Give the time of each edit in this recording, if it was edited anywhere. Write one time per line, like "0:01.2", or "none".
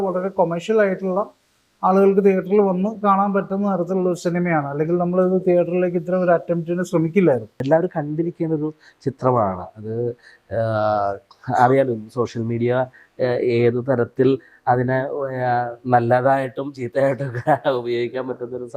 0:07.6